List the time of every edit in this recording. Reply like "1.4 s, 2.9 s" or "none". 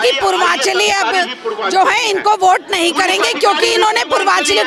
none